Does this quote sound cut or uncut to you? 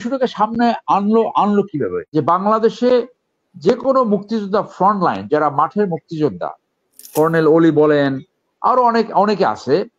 cut